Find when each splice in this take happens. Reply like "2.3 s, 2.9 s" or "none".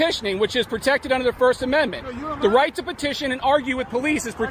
none